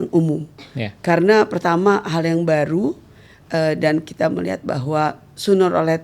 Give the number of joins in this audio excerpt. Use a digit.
0